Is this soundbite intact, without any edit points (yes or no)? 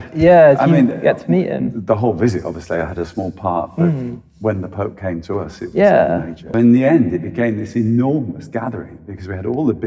no